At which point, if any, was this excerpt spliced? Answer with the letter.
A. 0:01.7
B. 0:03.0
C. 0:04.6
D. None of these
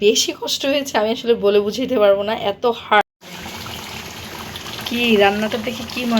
B